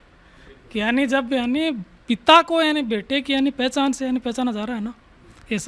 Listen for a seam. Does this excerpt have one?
no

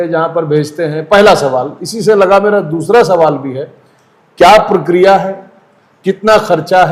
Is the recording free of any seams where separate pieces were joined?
yes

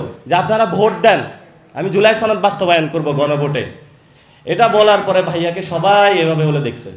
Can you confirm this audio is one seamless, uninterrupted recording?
yes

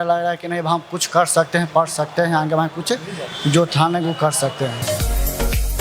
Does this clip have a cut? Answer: no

